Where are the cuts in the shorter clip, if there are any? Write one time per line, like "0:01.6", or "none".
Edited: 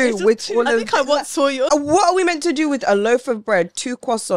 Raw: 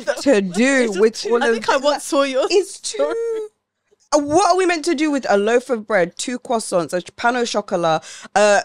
0:01.7